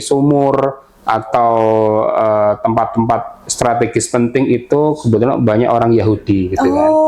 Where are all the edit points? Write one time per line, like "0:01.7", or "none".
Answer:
none